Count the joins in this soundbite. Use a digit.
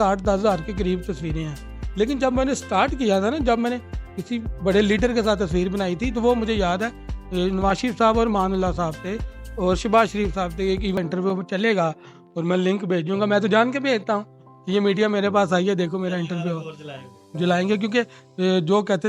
1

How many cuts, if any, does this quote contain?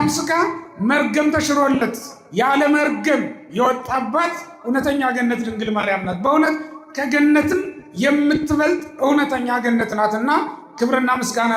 0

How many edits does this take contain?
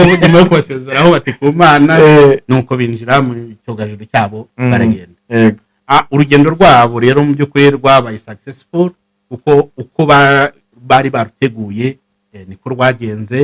0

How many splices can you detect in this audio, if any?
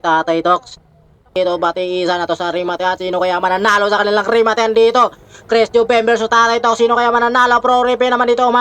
1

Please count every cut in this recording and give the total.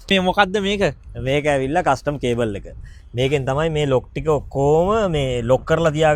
0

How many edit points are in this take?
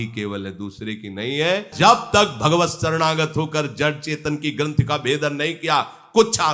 1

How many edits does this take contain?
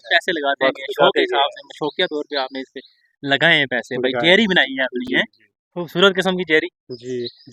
0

